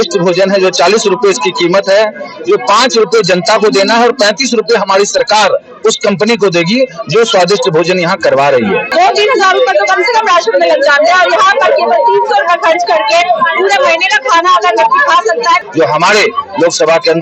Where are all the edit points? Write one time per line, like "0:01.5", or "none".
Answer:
0:08.9
0:15.6